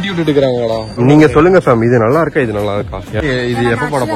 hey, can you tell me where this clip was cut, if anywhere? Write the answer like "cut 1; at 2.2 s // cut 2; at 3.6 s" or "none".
cut 1; at 0.9 s // cut 2; at 3.2 s